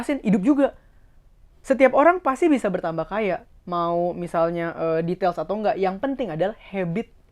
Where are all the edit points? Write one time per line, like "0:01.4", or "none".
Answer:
0:01.5